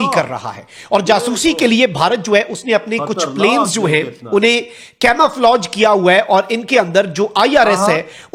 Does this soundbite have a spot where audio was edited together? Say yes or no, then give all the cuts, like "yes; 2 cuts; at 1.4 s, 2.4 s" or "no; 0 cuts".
no; 0 cuts